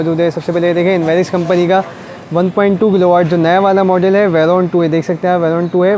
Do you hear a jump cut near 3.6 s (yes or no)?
no